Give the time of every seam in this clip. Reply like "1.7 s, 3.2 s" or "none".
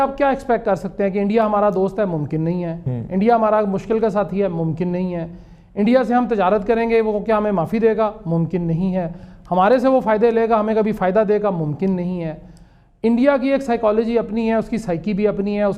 none